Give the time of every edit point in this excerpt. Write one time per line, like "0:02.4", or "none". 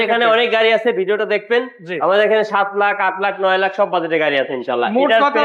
none